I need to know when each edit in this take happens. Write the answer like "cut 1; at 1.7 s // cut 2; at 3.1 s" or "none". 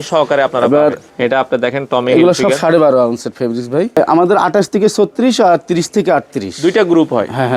cut 1; at 1.1 s // cut 2; at 4.0 s